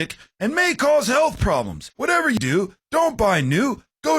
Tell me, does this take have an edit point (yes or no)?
yes